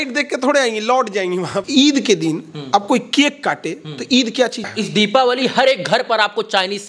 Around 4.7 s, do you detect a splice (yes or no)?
yes